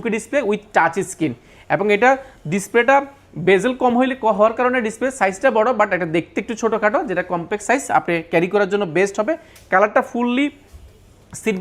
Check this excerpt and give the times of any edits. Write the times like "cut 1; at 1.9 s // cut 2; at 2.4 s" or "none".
none